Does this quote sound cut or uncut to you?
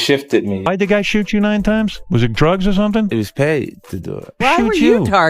cut